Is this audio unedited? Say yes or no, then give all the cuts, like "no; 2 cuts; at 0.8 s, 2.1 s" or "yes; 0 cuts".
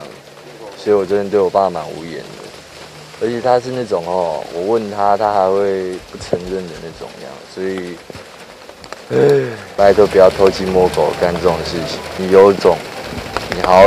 no; 2 cuts; at 9.6 s, 12.1 s